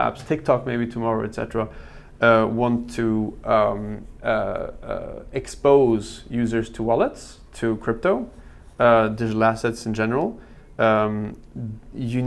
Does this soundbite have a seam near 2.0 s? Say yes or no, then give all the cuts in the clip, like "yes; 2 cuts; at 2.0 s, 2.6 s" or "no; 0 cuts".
no; 0 cuts